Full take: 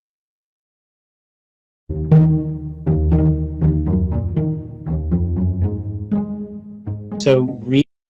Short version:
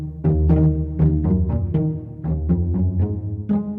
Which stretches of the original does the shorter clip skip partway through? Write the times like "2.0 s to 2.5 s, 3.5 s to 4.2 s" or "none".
none

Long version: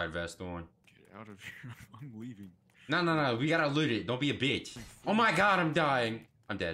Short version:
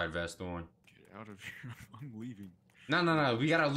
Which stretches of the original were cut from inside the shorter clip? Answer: none

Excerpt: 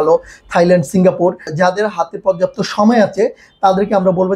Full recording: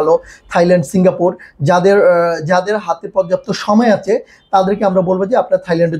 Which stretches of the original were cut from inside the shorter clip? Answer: 1.5 s to 2.4 s

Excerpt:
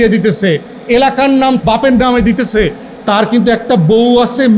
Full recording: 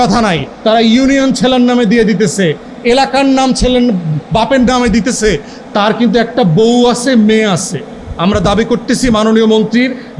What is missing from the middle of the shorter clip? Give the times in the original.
3.6 s to 4.3 s

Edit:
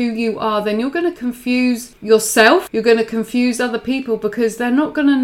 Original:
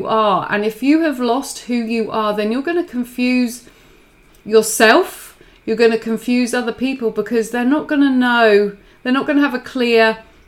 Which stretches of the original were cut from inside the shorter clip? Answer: 3.6 s to 4.3 s, 5.1 s to 5.6 s

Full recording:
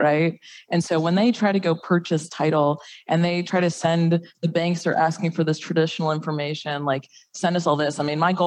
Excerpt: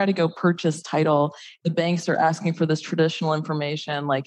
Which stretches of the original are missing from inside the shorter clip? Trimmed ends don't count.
3.0 s to 4.3 s

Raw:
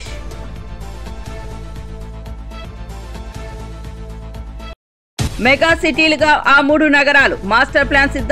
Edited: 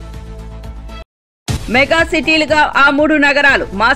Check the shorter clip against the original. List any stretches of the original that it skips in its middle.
2.6 s to 4.7 s

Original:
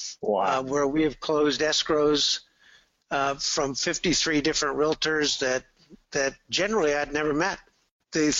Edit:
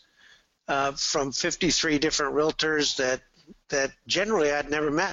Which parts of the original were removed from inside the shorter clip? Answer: none

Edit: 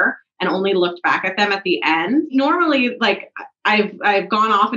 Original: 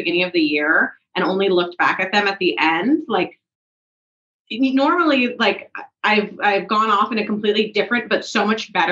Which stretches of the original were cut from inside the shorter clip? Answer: 3.1 s to 4.7 s

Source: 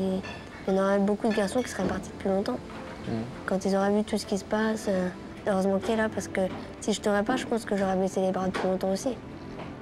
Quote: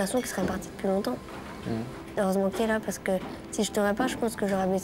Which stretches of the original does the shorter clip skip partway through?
3.4 s to 5.2 s

